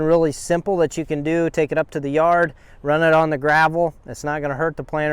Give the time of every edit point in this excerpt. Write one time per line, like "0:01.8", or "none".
none